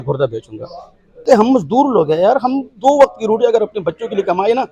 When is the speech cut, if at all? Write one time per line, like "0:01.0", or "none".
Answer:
0:01.2